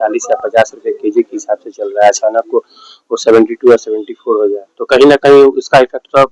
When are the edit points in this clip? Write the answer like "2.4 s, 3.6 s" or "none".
none